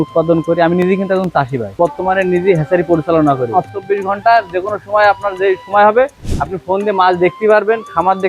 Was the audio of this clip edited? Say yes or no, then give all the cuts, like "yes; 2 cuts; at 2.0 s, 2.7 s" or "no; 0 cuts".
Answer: yes; 2 cuts; at 1.7 s, 3.7 s